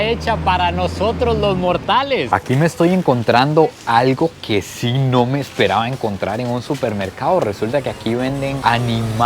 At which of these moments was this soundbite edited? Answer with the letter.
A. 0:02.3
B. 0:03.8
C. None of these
A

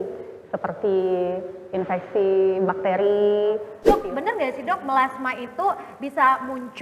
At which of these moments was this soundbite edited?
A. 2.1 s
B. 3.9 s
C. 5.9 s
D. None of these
B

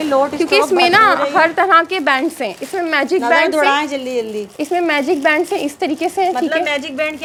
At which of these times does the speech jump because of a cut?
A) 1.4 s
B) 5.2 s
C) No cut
C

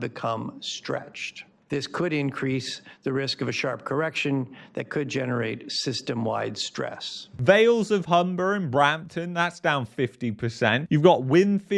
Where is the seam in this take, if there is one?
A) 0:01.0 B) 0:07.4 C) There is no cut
B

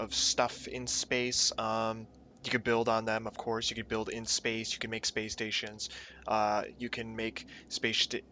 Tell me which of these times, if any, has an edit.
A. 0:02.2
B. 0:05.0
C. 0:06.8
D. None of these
A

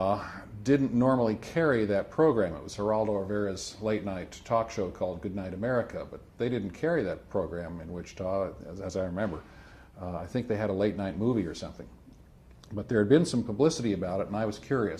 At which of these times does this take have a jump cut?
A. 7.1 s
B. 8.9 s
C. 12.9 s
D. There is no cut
B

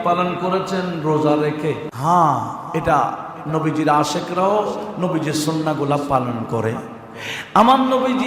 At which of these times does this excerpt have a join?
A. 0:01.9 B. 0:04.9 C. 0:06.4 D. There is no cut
A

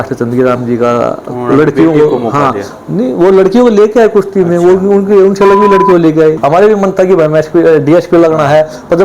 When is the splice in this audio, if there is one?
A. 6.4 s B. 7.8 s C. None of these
A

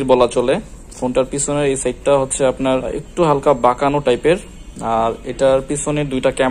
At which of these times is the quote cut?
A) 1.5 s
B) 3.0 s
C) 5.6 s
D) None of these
B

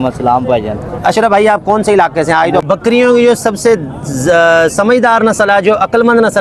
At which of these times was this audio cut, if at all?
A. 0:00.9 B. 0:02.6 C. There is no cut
B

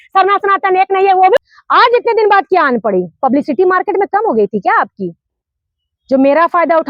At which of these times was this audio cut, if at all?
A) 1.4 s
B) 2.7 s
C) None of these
A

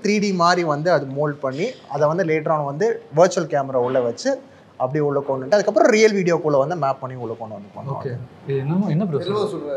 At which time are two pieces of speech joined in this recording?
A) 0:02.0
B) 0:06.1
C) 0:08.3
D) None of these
D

